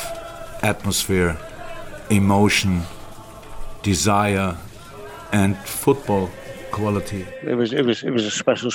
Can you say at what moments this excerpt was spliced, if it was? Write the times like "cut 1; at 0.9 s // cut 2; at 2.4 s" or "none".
cut 1; at 7.4 s